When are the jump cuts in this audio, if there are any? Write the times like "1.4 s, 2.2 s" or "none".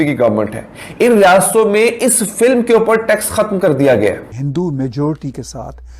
4.4 s